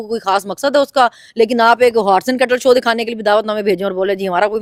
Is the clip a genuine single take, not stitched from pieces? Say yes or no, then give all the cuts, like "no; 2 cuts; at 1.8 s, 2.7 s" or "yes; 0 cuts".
yes; 0 cuts